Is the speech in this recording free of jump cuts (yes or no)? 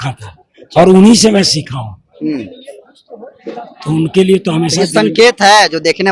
yes